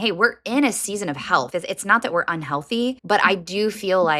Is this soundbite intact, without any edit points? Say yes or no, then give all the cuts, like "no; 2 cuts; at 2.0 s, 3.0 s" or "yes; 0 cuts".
no; 2 cuts; at 1.5 s, 3.0 s